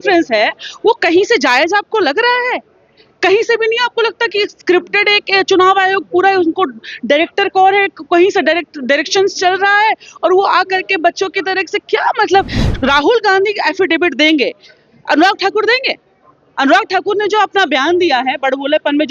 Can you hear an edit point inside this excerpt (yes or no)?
no